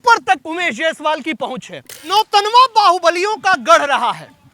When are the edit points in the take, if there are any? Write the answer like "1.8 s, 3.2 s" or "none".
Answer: 2.1 s